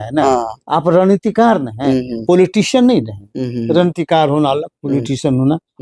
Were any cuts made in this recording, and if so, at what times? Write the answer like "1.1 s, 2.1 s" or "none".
none